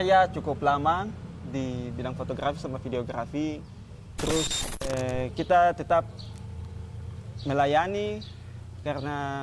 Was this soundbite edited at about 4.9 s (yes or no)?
yes